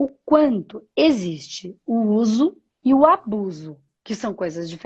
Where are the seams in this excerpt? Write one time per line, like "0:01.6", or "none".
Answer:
0:02.7